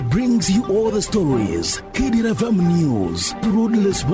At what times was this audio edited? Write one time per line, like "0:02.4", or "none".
0:03.2